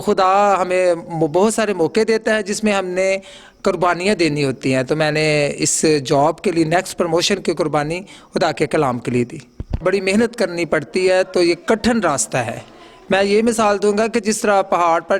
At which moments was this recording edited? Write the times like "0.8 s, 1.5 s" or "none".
9.7 s